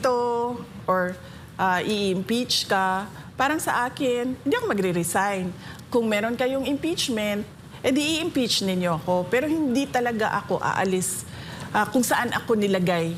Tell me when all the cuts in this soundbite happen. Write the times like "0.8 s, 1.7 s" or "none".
none